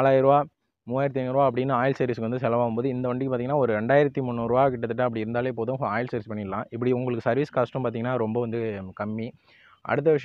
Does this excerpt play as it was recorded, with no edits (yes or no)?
yes